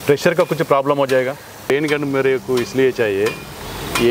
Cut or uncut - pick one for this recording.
cut